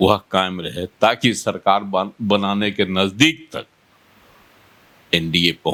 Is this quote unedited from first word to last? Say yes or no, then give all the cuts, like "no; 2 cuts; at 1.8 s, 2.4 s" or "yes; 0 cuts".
yes; 0 cuts